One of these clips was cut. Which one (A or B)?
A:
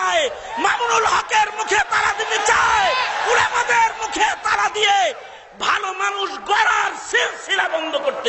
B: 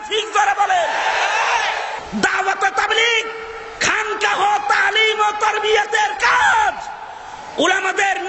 B